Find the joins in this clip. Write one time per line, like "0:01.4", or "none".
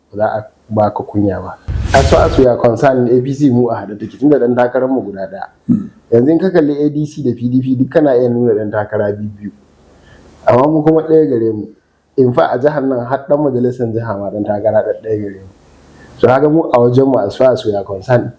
0:01.8